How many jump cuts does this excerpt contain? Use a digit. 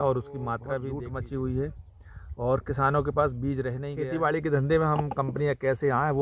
2